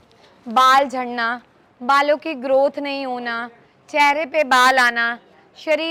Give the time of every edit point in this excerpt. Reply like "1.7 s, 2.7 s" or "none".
none